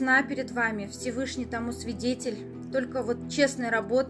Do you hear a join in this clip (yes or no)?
no